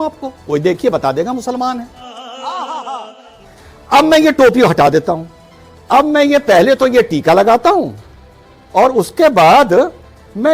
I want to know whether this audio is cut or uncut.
uncut